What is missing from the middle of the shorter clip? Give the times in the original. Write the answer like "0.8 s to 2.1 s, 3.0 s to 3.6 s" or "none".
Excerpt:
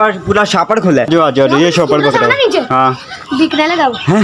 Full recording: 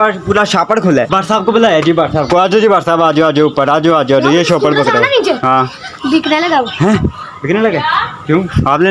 1.1 s to 3.8 s